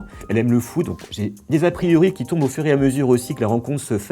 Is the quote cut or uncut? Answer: uncut